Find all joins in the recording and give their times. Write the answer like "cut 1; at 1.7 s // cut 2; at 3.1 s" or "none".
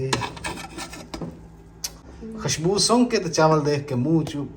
cut 1; at 2.1 s

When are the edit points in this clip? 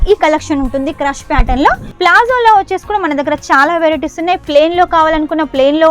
cut 1; at 1.9 s

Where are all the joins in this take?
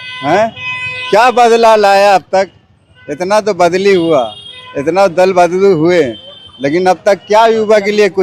none

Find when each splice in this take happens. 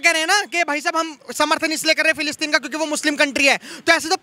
none

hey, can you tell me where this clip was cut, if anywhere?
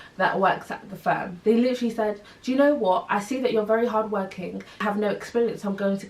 cut 1; at 1.3 s // cut 2; at 4.8 s

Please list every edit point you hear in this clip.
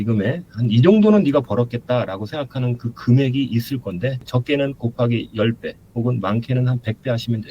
cut 1; at 4.2 s

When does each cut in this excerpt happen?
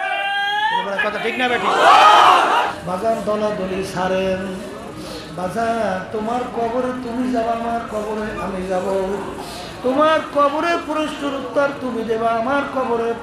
cut 1; at 2.7 s

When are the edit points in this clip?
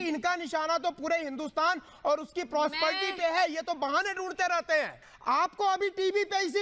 cut 1; at 5.1 s

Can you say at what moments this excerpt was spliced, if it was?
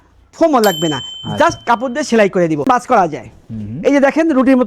cut 1; at 2.6 s

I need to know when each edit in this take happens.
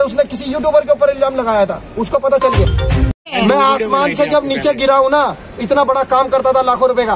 cut 1; at 3.0 s

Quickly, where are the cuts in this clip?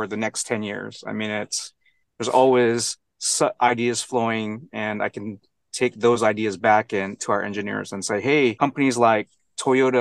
cut 1; at 8.6 s

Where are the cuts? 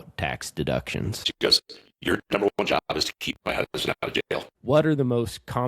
cut 1; at 1.3 s // cut 2; at 4.5 s

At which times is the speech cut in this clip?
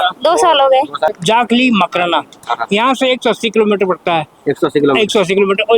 cut 1; at 1.1 s // cut 2; at 2.4 s

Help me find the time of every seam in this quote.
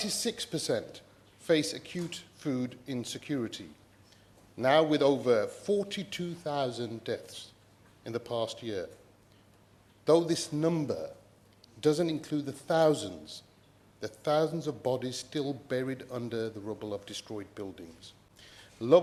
none

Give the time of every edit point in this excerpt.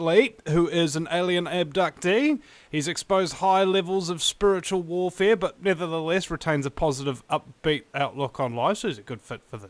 cut 1; at 5.4 s

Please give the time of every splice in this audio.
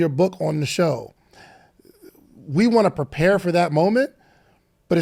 none

